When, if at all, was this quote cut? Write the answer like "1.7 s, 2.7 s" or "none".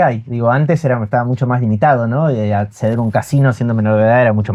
none